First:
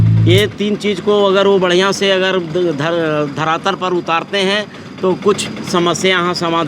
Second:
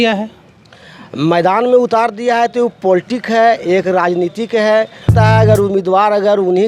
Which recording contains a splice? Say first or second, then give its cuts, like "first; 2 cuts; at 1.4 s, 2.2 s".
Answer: second; 1 cut; at 5.0 s